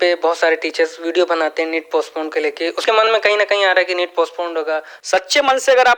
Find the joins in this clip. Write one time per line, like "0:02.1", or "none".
0:02.8
0:04.9